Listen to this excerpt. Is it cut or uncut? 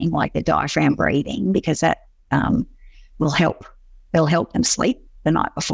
uncut